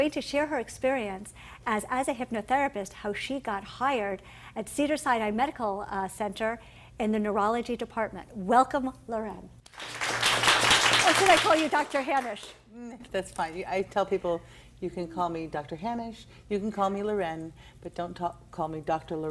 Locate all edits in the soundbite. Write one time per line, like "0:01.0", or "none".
0:15.0